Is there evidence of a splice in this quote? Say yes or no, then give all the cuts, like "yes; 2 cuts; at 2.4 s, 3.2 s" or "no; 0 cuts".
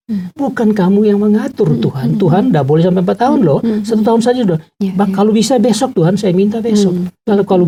no; 0 cuts